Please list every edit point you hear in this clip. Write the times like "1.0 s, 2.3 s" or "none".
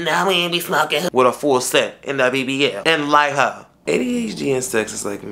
1.1 s, 3.8 s